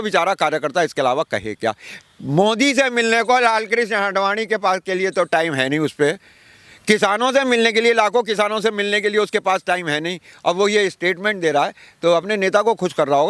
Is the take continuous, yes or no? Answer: yes